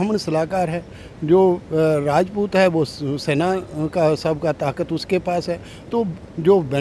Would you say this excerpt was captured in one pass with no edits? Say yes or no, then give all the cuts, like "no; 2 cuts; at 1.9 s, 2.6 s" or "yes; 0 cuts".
yes; 0 cuts